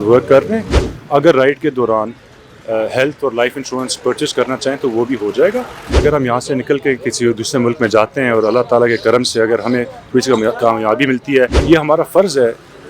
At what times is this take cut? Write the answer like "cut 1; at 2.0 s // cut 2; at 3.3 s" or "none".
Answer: cut 1; at 0.9 s // cut 2; at 5.9 s // cut 3; at 11.6 s